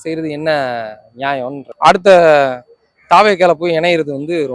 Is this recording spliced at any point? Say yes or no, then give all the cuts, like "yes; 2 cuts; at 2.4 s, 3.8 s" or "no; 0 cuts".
yes; 1 cut; at 1.6 s